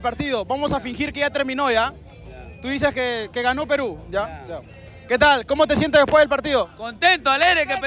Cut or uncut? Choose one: uncut